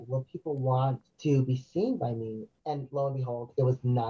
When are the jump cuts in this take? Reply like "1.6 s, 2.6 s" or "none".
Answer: 1.1 s, 2.5 s